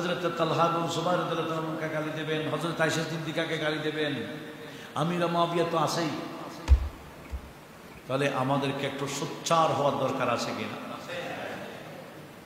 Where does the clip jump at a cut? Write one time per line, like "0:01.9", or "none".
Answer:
none